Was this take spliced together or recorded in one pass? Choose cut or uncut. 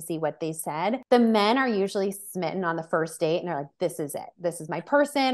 cut